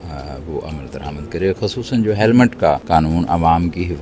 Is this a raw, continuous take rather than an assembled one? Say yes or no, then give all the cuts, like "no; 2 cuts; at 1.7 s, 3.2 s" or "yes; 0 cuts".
no; 1 cut; at 2.8 s